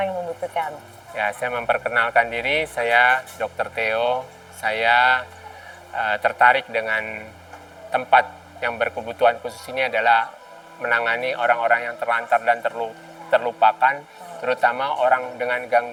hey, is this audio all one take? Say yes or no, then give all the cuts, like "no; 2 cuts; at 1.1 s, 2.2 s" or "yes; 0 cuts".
yes; 0 cuts